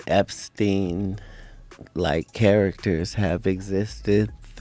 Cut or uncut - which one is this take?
uncut